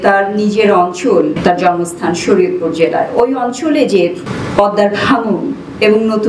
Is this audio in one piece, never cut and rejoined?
no; 2 cuts; at 1.4 s, 4.3 s

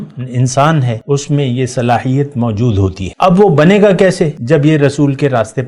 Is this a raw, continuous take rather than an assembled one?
no; 3 cuts; at 1.0 s, 3.0 s, 4.4 s

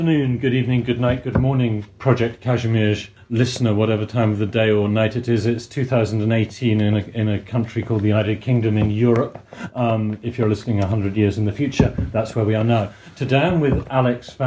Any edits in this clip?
no; 0 cuts

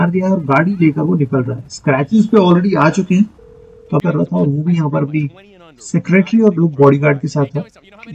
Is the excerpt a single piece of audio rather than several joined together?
no; 1 cut; at 4.0 s

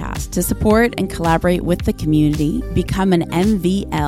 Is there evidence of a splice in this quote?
no; 0 cuts

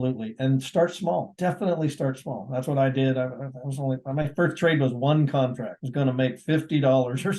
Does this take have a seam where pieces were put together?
no; 0 cuts

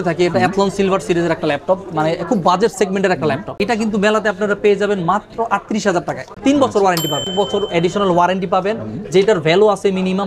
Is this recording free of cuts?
no; 3 cuts; at 3.5 s, 6.3 s, 7.3 s

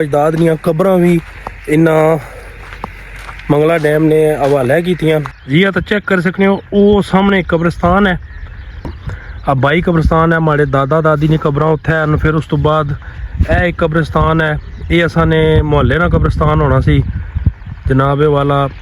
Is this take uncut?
no; 2 cuts; at 5.4 s, 8.9 s

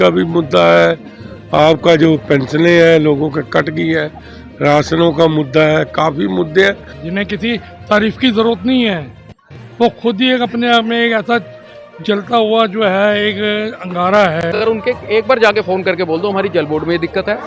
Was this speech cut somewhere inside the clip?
yes; 2 cuts; at 6.9 s, 14.4 s

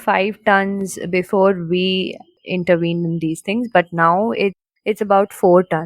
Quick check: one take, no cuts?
no; 2 cuts; at 2.3 s, 4.7 s

